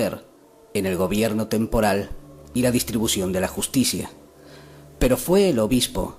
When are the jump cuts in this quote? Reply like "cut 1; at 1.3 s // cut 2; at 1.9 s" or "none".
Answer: cut 1; at 2.1 s

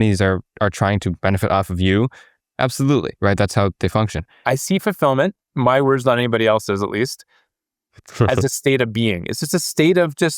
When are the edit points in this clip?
cut 1; at 4.4 s

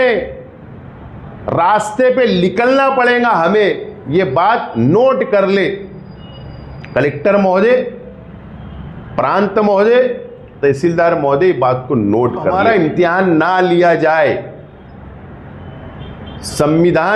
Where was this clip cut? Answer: cut 1; at 12.5 s

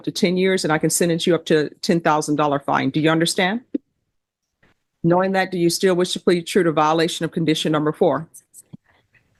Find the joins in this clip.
none

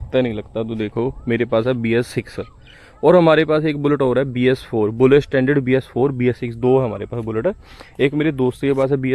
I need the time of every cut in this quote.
none

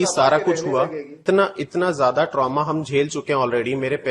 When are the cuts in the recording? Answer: cut 1; at 1.2 s

